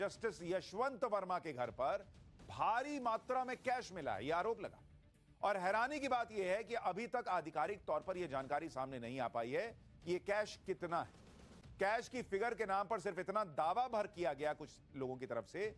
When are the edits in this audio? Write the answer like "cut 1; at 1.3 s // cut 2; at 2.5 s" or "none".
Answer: none